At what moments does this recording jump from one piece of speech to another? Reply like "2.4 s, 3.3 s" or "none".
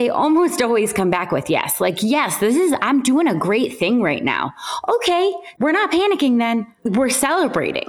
5.5 s, 6.8 s